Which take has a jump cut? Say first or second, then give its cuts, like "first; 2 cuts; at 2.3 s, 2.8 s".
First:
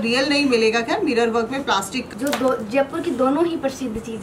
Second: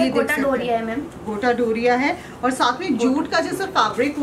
first; 1 cut; at 2.1 s